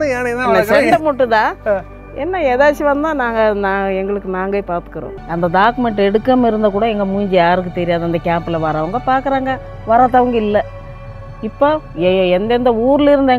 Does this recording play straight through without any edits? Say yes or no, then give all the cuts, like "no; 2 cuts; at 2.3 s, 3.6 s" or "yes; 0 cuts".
no; 1 cut; at 5.1 s